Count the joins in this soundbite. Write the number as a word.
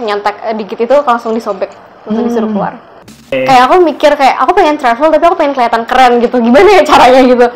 one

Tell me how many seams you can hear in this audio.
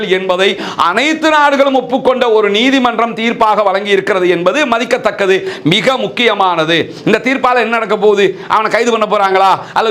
zero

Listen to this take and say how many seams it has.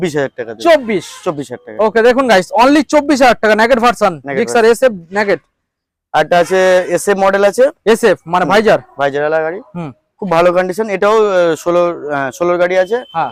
zero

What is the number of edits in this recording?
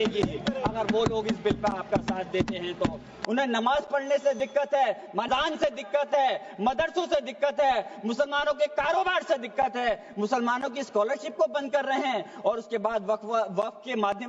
two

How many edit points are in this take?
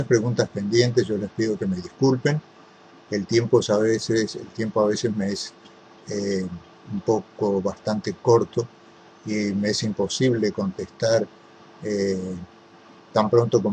one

